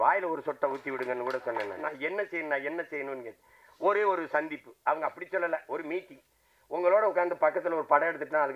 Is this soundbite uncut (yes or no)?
no